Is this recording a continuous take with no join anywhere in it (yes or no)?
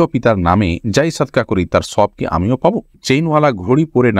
no